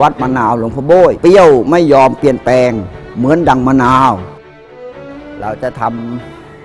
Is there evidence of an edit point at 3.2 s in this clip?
no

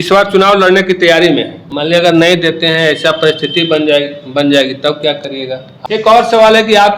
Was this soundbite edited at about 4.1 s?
no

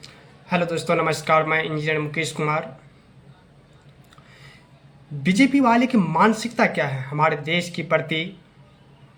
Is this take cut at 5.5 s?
no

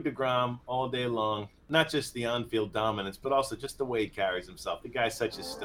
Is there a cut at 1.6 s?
yes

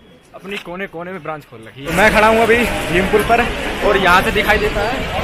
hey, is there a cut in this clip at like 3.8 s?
no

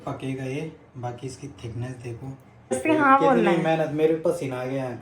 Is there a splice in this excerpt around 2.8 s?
yes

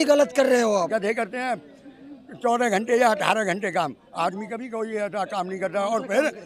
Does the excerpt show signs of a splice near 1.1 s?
yes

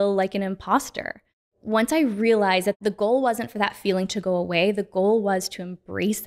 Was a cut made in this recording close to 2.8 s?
yes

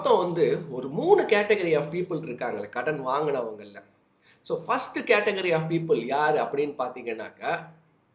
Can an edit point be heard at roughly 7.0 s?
no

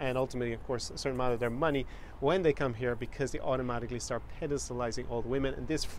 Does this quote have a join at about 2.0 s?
no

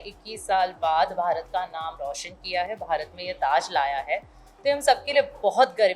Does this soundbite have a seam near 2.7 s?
no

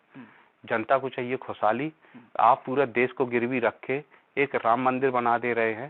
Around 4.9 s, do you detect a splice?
no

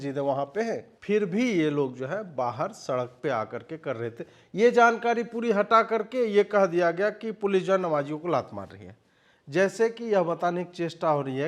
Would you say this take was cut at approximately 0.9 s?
yes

